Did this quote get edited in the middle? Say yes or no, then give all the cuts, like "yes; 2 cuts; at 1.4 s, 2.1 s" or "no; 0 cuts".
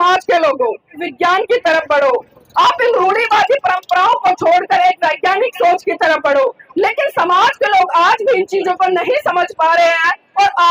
yes; 1 cut; at 1.1 s